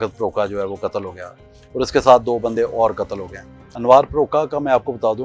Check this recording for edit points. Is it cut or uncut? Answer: cut